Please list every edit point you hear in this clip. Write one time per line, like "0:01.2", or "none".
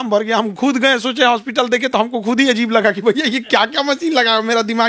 none